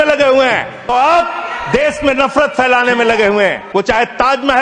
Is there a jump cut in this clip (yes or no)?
yes